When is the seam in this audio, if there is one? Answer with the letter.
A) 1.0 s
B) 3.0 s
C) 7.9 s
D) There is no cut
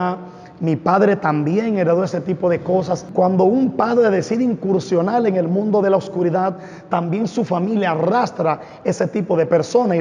B